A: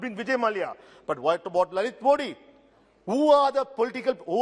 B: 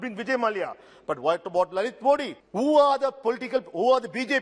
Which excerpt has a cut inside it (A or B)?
B